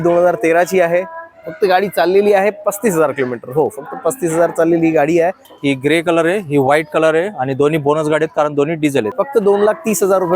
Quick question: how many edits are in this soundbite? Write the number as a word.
two